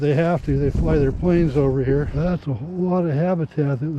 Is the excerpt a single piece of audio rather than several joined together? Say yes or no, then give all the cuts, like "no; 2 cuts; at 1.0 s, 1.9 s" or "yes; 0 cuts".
no; 1 cut; at 2.1 s